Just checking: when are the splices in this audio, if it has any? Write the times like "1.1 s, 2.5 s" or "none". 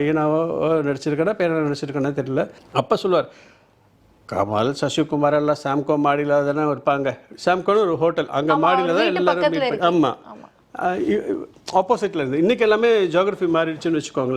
2.6 s